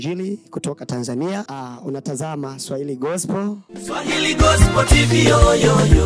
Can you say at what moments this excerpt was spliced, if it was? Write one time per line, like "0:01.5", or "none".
0:01.5
0:03.7